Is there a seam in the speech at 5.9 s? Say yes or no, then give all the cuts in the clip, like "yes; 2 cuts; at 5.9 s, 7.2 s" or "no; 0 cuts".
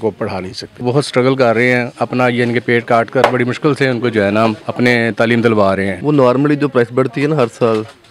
yes; 3 cuts; at 0.8 s, 4.6 s, 5.9 s